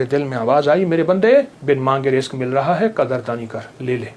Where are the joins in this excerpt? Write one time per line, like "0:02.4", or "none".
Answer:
0:01.5